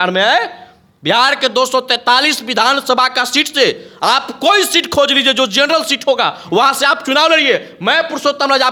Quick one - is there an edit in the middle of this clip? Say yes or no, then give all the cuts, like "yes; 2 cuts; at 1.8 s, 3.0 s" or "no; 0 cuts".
no; 0 cuts